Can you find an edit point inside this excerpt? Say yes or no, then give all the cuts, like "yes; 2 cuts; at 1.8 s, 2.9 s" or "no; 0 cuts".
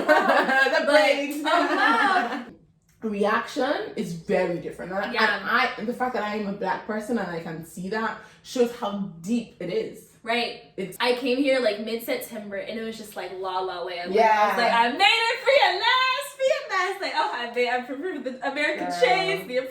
yes; 2 cuts; at 2.5 s, 10.9 s